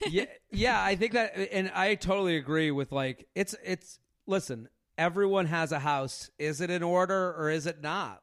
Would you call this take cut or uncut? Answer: uncut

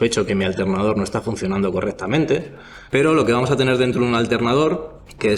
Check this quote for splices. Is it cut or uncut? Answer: cut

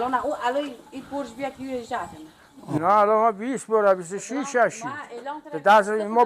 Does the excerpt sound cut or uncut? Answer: uncut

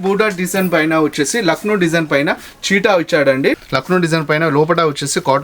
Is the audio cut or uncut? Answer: cut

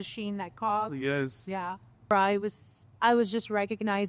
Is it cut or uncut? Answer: cut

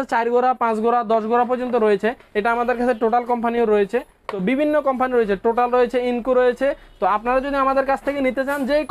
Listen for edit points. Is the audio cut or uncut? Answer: uncut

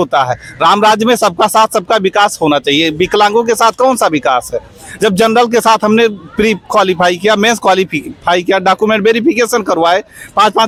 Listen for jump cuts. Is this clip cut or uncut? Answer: uncut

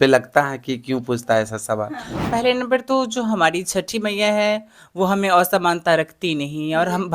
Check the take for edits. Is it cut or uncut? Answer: cut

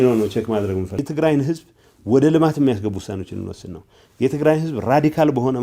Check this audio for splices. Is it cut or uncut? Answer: cut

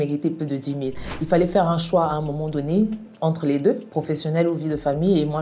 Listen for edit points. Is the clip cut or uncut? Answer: cut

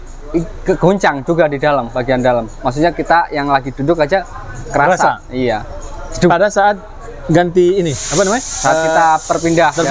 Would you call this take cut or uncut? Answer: uncut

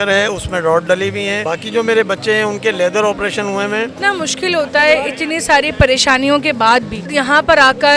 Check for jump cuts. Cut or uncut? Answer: cut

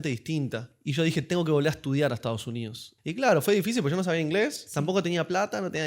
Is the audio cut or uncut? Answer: cut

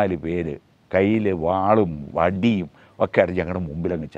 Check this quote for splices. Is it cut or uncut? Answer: uncut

